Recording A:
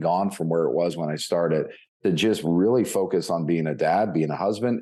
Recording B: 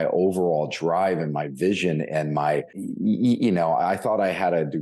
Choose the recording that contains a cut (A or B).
B